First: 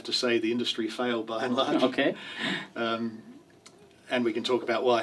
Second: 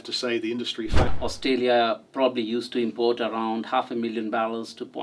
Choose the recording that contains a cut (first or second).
second